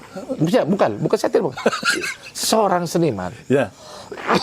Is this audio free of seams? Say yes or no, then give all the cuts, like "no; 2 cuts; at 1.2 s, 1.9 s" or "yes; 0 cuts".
yes; 0 cuts